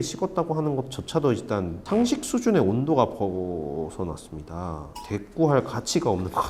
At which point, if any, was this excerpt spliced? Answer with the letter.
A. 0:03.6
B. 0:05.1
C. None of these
B